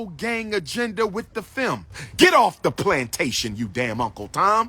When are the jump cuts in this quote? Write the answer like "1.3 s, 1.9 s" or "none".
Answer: 2.0 s